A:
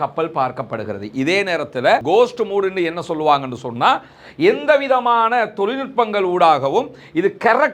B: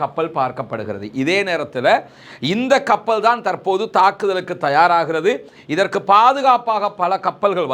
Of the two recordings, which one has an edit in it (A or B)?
A